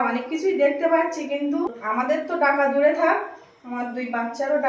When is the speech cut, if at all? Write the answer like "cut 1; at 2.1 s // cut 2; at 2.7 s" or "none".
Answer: cut 1; at 1.8 s